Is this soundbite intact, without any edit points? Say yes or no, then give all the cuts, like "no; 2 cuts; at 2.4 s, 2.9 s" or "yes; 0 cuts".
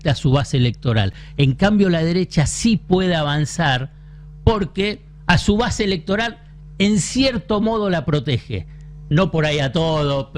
yes; 0 cuts